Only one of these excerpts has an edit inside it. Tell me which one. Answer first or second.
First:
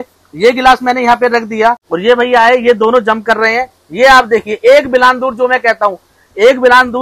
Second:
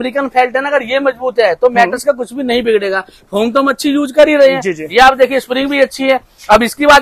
first